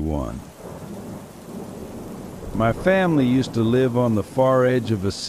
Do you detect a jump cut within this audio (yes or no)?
yes